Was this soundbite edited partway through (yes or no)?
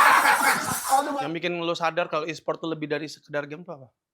yes